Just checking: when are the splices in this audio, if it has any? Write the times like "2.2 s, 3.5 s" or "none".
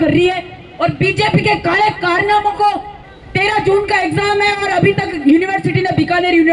2.9 s